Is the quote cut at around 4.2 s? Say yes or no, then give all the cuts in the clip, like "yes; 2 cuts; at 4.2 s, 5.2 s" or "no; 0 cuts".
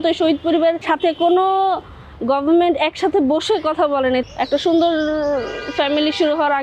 yes; 2 cuts; at 0.8 s, 4.2 s